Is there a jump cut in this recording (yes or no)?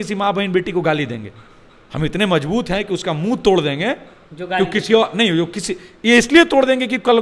no